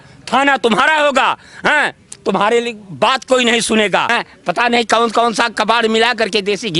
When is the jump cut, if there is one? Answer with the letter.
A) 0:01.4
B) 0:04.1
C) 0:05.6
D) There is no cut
B